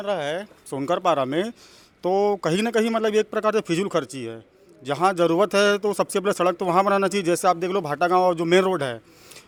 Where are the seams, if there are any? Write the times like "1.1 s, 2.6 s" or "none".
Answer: none